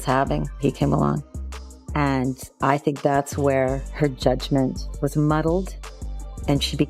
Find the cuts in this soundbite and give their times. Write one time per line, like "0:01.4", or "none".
none